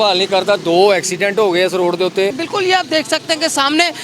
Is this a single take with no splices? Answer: no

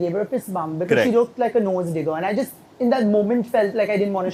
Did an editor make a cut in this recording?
no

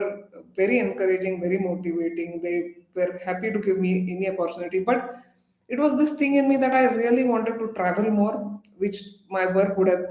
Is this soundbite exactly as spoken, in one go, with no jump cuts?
yes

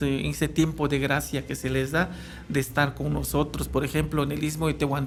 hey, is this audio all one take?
yes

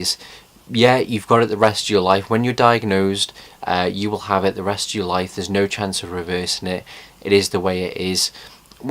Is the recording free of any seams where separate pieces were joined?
no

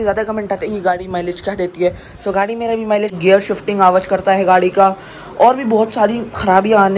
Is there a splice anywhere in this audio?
yes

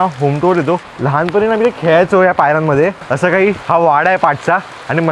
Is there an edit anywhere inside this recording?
yes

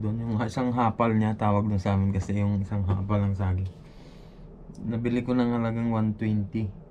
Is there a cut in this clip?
no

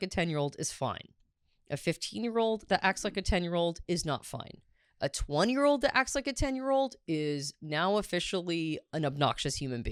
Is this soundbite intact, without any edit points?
yes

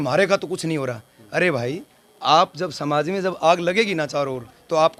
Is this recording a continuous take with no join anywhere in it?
yes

